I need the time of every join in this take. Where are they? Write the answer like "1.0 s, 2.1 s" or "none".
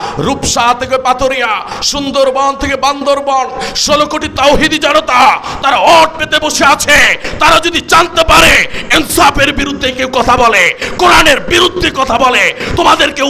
none